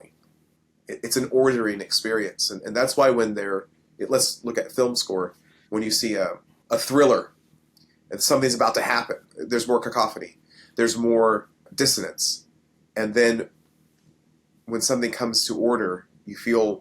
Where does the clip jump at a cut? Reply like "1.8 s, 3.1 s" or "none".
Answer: 6.5 s, 9.3 s, 11.6 s